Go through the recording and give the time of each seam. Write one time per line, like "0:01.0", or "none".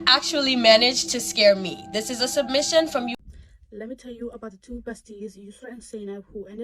0:03.2